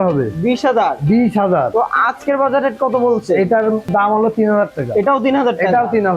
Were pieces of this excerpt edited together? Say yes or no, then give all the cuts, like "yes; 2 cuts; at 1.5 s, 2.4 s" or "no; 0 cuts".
no; 0 cuts